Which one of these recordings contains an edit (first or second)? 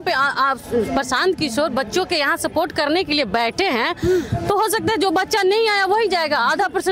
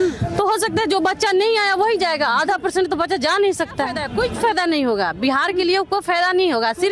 second